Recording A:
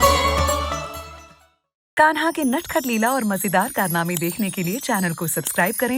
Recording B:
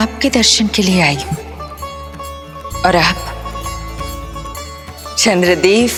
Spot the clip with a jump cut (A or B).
A